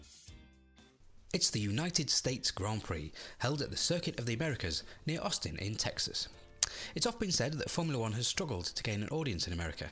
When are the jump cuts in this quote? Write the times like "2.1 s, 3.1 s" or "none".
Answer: 1.3 s